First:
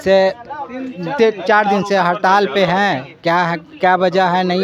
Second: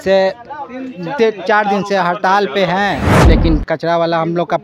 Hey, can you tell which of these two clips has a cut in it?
second; 1 cut; at 3.1 s

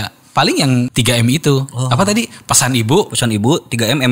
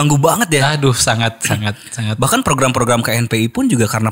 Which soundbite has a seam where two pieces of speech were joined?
first; 1 cut; at 0.9 s

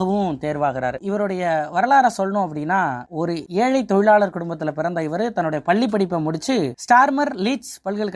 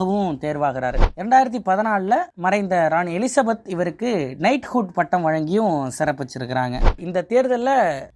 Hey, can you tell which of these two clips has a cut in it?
second; 2 cuts; at 1.1 s, 6.9 s

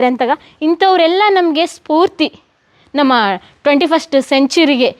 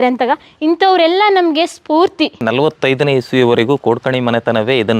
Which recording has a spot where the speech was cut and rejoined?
second; 1 cut; at 2.4 s

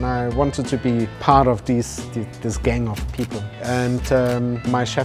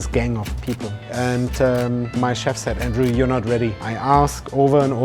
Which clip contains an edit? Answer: second; 1 cut; at 3.8 s

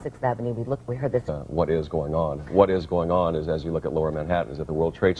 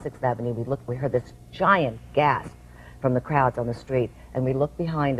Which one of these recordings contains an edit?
second; 1 cut; at 1.2 s

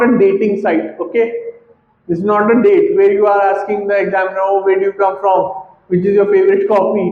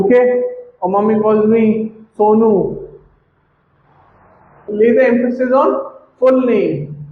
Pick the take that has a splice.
second; 1 cut; at 4.7 s

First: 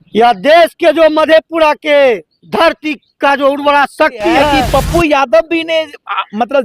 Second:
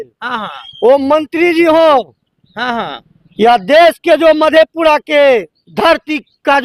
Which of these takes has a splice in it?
first; 1 cut; at 4.5 s

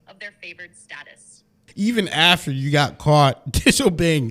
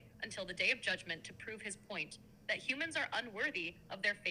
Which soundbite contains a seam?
first; 1 cut; at 1.6 s

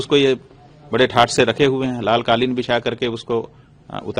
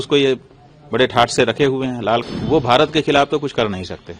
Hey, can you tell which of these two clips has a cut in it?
second; 1 cut; at 2.2 s

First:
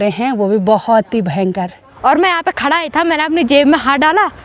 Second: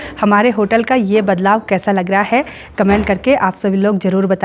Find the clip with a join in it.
first; 1 cut; at 1.8 s

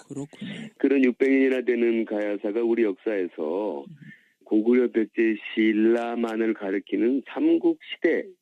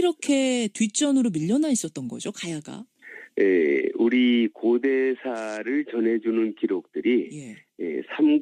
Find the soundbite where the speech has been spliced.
first; 1 cut; at 3.0 s

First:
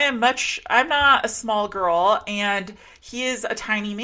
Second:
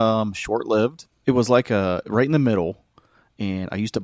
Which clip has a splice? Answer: second; 1 cut; at 1.0 s

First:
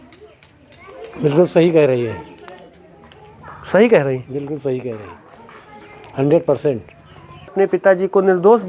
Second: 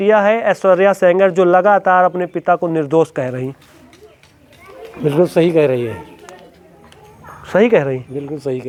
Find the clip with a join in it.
first; 1 cut; at 7.5 s

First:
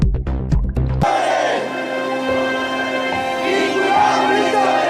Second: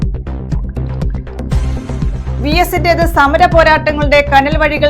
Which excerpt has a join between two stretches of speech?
first; 1 cut; at 1.0 s

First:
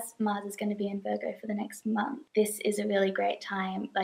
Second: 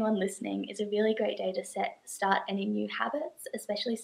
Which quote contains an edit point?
first; 1 cut; at 2.2 s

